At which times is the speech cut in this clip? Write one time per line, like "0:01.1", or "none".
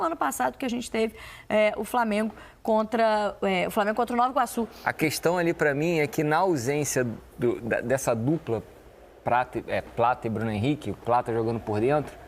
0:04.7